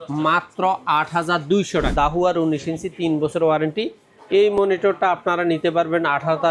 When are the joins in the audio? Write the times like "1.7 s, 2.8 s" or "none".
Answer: 1.9 s

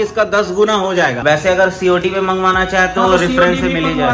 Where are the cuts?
1.2 s

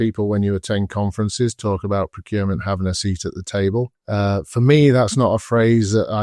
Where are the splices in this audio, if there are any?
4.0 s

